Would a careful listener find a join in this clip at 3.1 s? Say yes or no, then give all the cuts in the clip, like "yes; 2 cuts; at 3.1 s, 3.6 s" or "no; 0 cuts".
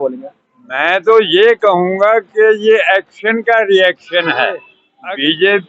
no; 1 cut; at 4.8 s